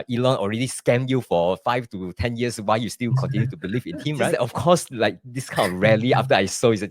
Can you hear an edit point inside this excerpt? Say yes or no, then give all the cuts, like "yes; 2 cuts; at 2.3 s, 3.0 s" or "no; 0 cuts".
yes; 1 cut; at 4.3 s